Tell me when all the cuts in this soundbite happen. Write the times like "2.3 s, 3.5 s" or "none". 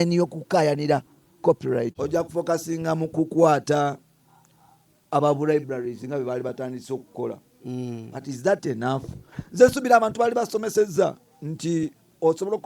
2.0 s

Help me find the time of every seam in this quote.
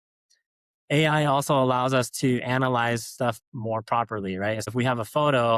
4.7 s

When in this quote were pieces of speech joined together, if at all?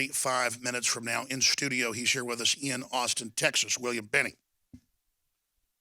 3.2 s

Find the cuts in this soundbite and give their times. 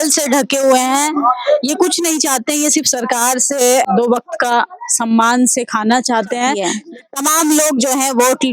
3.9 s, 6.7 s

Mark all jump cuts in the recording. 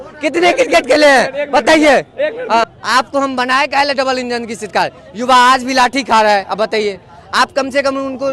2.7 s

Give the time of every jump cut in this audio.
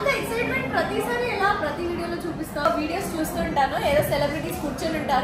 2.7 s

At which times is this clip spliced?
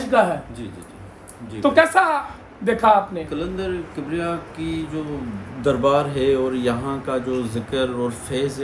3.3 s

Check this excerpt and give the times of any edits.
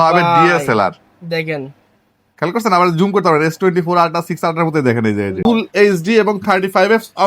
5.4 s

